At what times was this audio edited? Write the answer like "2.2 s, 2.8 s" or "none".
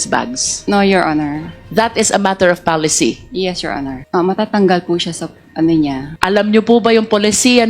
none

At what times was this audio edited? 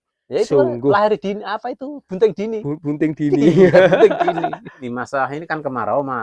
4.9 s

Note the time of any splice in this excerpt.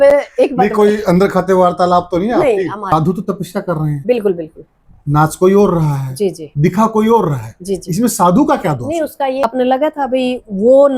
2.9 s, 9.4 s

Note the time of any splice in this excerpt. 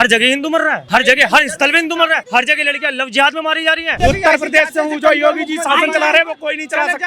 0.8 s, 2.2 s, 4.0 s

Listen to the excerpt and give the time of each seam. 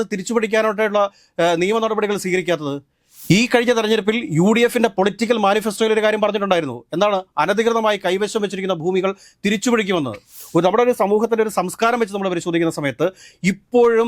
10.4 s

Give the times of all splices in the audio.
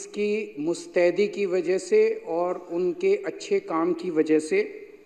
none

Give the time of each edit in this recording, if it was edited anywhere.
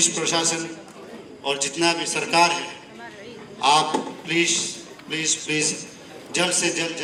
none

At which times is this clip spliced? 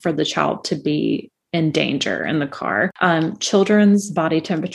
2.9 s

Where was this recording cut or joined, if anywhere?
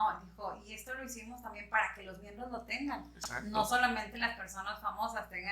none

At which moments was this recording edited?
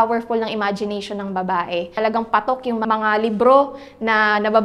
1.9 s, 2.9 s

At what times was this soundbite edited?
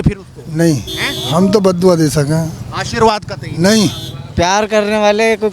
4.2 s

